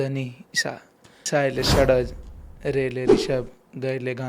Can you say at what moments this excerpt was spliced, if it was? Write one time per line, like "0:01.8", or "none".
0:01.2